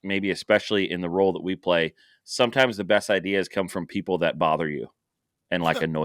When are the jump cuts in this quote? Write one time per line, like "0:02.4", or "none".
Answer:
none